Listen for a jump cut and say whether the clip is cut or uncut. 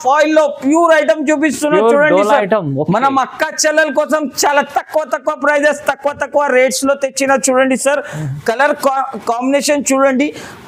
uncut